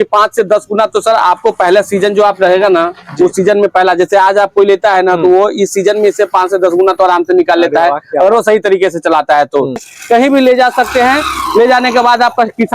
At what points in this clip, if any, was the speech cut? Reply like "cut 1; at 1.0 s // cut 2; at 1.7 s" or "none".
cut 1; at 9.9 s

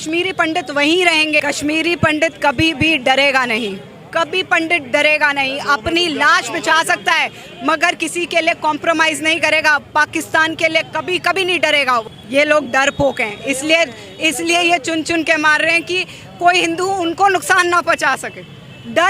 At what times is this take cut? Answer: cut 1; at 1.4 s // cut 2; at 12.1 s

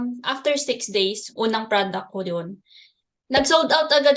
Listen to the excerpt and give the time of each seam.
cut 1; at 1.3 s

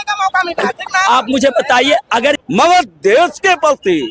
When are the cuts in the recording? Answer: cut 1; at 2.4 s

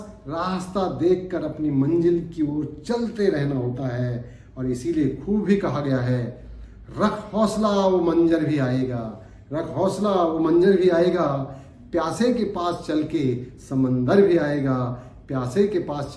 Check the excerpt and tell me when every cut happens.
none

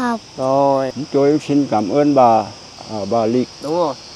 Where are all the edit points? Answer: cut 1; at 0.9 s // cut 2; at 2.9 s

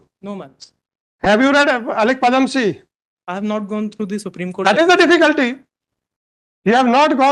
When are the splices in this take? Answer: none

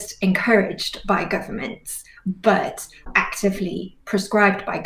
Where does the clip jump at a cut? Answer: cut 1; at 3.1 s

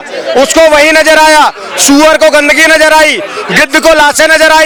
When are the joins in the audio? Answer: none

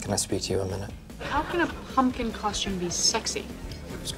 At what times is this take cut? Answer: cut 1; at 1.1 s

